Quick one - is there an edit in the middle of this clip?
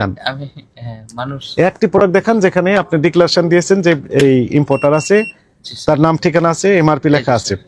no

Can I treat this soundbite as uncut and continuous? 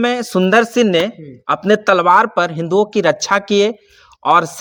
yes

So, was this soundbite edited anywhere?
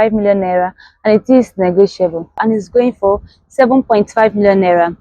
yes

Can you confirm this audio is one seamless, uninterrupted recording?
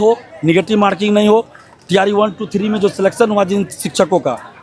yes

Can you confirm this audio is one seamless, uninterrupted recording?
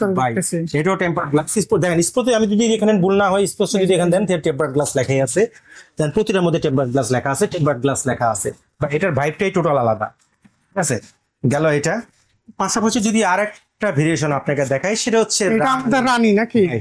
yes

